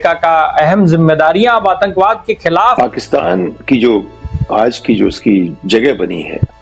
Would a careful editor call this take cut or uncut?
cut